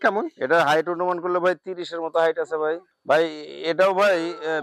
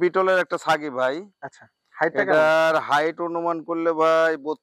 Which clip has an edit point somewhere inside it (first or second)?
first